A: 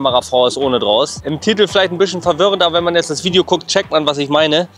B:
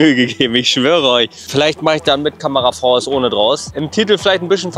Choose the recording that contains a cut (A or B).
B